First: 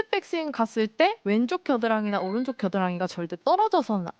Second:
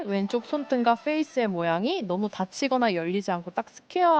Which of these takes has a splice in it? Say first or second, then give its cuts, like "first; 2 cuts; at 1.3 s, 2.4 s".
first; 1 cut; at 1.2 s